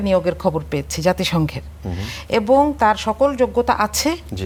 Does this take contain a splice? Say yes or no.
no